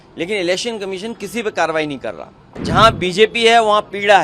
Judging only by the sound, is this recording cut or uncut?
cut